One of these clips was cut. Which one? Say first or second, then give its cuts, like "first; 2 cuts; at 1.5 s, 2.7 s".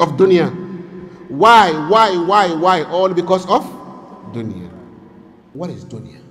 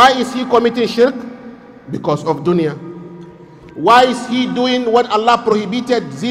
first; 1 cut; at 5.4 s